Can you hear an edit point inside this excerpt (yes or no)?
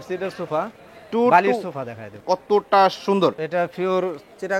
yes